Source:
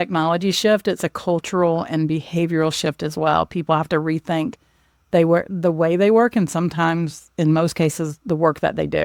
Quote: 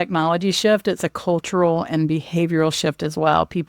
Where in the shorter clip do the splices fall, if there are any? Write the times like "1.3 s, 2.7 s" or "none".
none